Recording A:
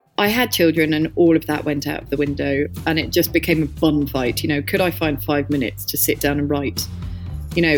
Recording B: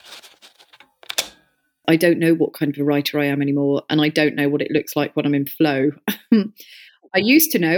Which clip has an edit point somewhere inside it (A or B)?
B